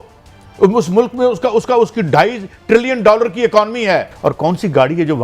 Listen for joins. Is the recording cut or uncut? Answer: cut